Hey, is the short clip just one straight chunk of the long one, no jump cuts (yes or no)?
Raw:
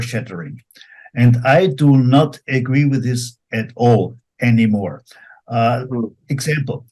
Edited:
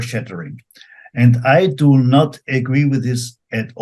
yes